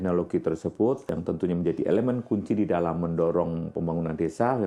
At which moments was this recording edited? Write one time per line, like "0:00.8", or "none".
0:01.1